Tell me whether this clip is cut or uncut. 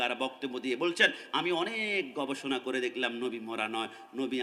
uncut